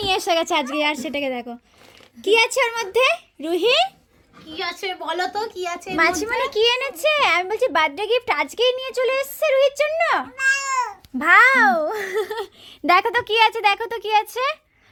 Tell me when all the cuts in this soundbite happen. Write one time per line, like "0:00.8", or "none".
none